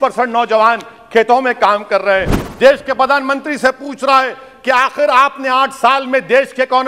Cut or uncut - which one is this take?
cut